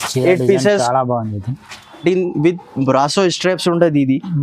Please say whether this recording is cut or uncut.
cut